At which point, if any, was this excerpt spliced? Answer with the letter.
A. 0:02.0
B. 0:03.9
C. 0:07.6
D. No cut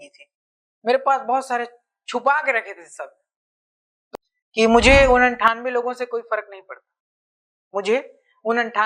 B